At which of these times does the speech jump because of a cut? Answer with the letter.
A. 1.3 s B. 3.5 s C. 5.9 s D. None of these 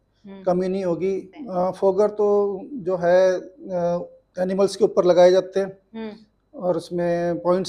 A